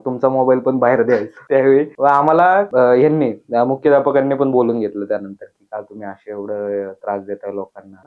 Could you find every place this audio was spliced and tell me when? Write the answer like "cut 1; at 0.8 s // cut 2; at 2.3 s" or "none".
none